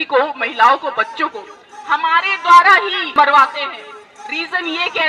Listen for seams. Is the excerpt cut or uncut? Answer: cut